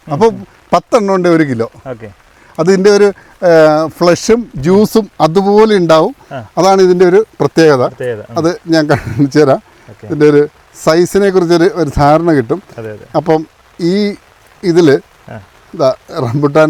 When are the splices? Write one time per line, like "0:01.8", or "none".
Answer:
none

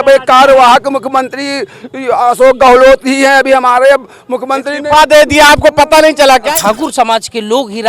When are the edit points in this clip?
0:06.5

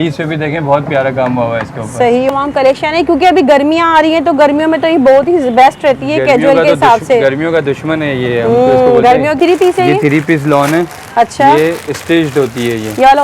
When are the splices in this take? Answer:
0:02.3
0:09.4

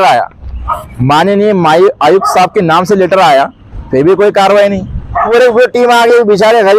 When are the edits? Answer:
0:05.3

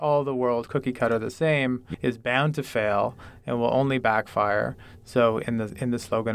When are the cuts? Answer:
0:01.9

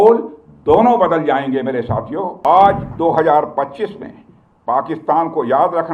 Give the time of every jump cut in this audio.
0:02.4

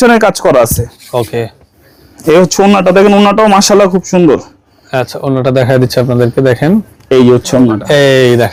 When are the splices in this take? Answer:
none

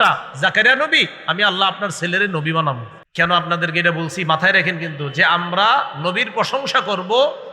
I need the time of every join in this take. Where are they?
0:03.0

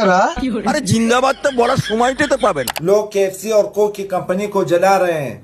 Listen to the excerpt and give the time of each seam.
0:02.7

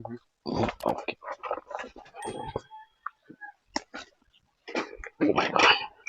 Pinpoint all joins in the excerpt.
0:02.1

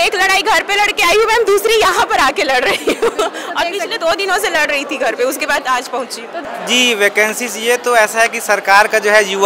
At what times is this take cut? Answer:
0:06.4

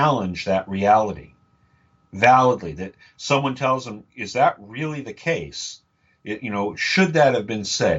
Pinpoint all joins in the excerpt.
none

